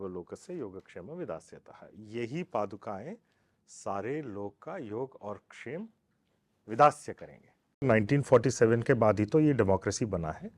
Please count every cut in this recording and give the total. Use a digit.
1